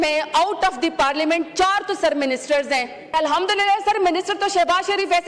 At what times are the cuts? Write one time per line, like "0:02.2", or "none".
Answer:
0:03.1